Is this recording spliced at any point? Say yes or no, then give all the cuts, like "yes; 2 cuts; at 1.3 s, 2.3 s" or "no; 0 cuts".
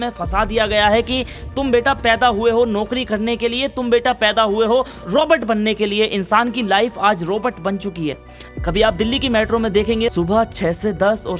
no; 0 cuts